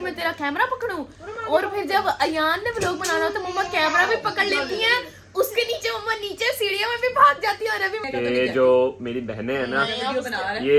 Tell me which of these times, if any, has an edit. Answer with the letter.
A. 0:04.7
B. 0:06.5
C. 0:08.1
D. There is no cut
C